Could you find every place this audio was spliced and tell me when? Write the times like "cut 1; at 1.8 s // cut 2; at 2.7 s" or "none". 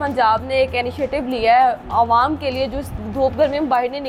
none